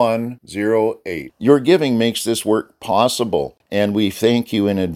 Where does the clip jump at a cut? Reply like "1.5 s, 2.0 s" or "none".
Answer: 3.6 s